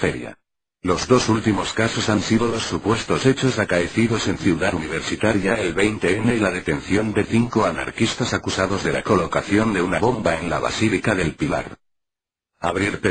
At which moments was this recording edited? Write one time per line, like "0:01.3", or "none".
none